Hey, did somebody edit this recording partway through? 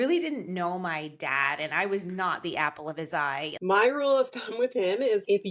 yes; 1 cut; at 3.5 s

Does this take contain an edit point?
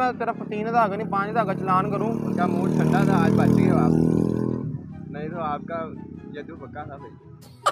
no; 0 cuts

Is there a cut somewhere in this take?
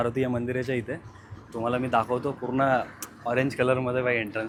no; 0 cuts

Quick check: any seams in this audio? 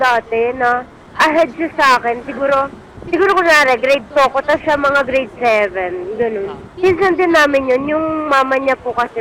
no; 0 cuts

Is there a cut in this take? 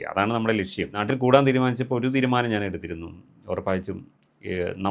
yes; 1 cut; at 1.0 s

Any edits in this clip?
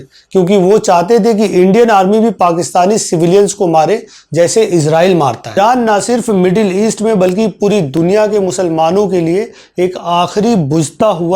yes; 1 cut; at 5.6 s

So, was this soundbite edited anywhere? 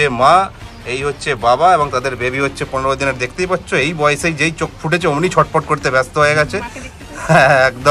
no; 0 cuts

